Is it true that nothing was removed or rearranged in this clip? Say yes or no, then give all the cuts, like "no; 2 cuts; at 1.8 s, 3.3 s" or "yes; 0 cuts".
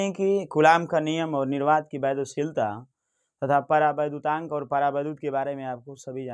yes; 0 cuts